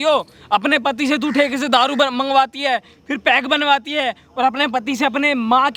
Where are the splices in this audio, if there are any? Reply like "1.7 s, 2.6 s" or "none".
none